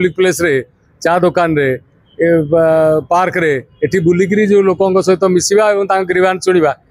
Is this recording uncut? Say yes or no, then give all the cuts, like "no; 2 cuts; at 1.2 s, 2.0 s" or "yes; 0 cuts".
yes; 0 cuts